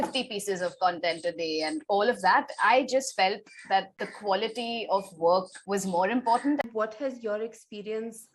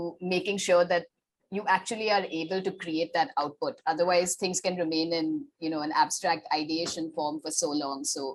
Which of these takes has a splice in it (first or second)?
first